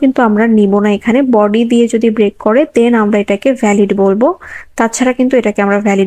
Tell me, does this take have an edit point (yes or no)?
no